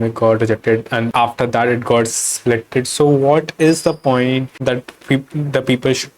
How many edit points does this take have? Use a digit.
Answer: 2